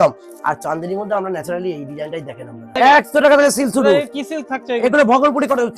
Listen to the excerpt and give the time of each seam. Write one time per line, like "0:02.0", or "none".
0:02.7

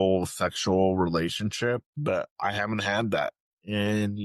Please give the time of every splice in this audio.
0:01.9

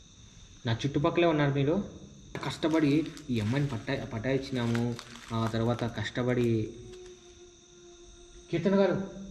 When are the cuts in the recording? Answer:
0:02.4

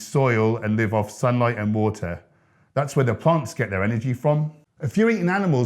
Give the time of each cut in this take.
0:04.6

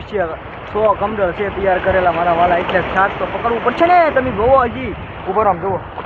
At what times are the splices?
none

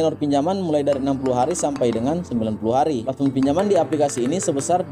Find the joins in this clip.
0:03.1

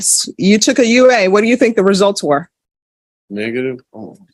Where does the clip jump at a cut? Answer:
none

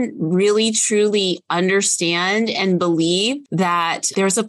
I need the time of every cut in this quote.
0:03.4

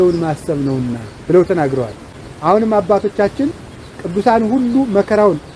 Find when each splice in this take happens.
none

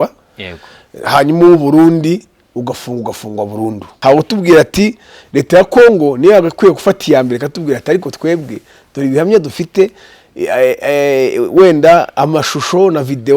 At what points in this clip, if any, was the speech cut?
0:03.9

